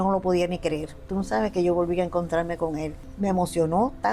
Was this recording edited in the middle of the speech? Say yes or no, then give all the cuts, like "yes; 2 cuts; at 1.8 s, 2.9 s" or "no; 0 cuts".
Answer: yes; 1 cut; at 3.0 s